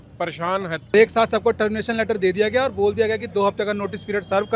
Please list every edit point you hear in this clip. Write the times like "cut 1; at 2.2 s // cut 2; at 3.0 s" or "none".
cut 1; at 0.9 s